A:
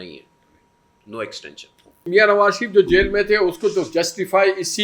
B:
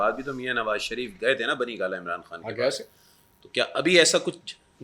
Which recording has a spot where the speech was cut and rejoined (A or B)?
A